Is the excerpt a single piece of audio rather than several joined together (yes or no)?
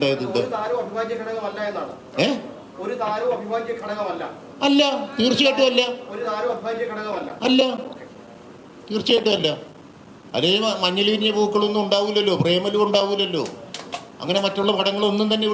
yes